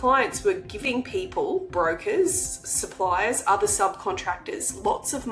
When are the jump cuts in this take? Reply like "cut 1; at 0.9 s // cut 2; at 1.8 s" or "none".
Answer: none